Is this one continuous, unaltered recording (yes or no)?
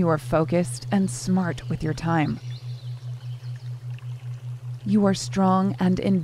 yes